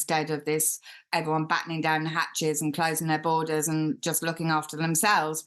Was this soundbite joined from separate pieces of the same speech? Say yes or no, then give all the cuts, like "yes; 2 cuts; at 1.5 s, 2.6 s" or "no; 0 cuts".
yes; 1 cut; at 1.1 s